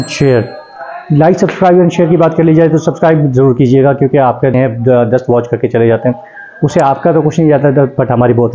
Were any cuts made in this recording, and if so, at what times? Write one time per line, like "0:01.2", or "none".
0:04.5

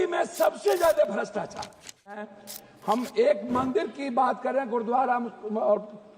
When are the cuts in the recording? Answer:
0:02.3

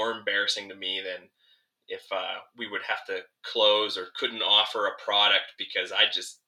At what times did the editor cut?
none

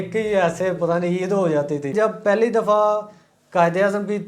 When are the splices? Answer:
0:01.9

